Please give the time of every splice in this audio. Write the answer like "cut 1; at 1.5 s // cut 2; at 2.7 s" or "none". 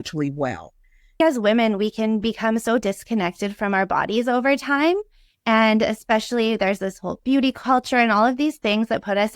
cut 1; at 1.2 s

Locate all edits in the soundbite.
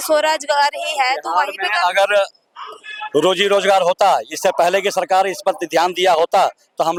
none

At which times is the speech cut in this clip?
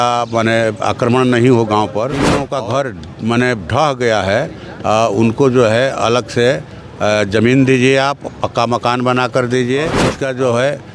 cut 1; at 2.4 s // cut 2; at 10.0 s

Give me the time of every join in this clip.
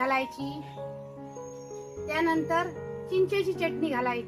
none

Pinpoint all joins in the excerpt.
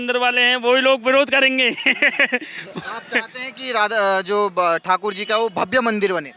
none

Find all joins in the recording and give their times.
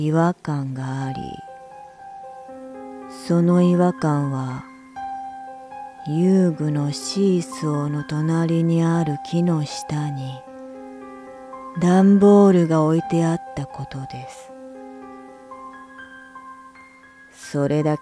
cut 1; at 10.1 s

